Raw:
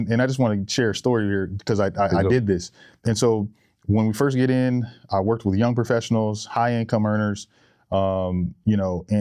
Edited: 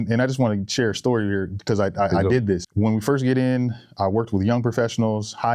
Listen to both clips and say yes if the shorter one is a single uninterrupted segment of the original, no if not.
no